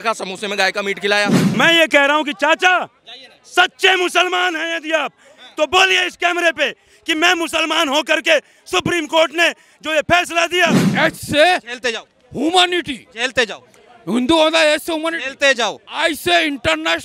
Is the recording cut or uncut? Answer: cut